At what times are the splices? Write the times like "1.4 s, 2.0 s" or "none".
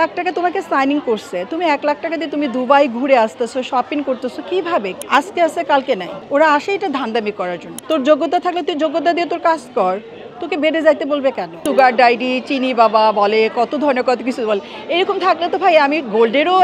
5.0 s, 6.1 s, 7.7 s, 11.6 s